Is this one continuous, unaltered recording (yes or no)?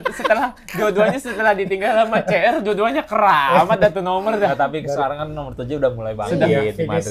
yes